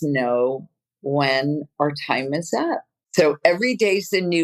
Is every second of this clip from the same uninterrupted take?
no; 1 cut; at 3.0 s

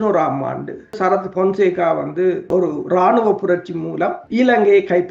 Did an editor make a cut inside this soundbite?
yes; 3 cuts; at 1.0 s, 2.4 s, 4.2 s

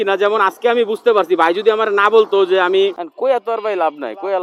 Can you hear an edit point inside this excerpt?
yes; 1 cut; at 3.1 s

